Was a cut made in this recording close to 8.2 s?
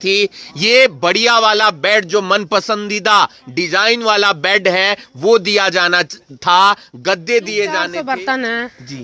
yes; 1 cut; at 8.2 s

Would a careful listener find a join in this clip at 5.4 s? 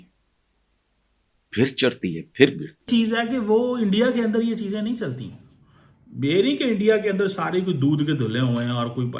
no; 1 cut; at 2.7 s

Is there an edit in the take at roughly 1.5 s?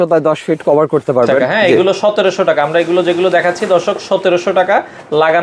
yes; 1 cut; at 1.5 s

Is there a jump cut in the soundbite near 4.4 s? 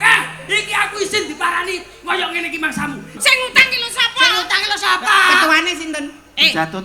no; 1 cut; at 3.1 s

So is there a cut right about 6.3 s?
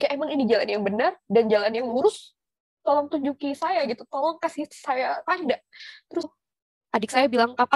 yes; 1 cut; at 6.3 s

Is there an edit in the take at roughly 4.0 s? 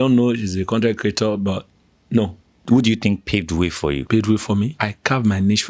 yes; 3 cuts; at 2.6 s, 4.0 s, 4.8 s

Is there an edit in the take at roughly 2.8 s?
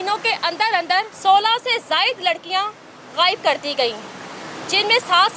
no; 1 cut; at 1.1 s

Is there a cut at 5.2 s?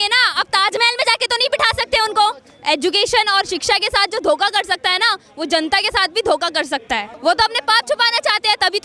no; 2 cuts; at 2.5 s, 7.1 s

